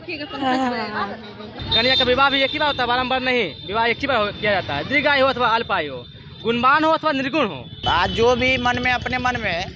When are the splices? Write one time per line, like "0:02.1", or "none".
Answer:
0:01.5
0:07.7